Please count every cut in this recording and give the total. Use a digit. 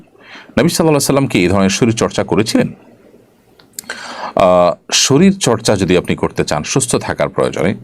0